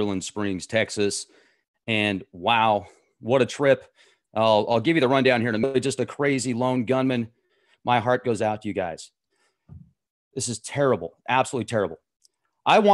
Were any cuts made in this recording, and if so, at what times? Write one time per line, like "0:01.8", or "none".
none